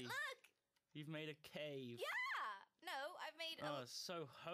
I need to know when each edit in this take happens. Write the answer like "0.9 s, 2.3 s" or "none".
1.0 s